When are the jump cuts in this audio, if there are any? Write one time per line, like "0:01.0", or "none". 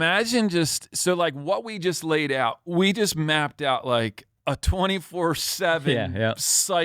0:04.3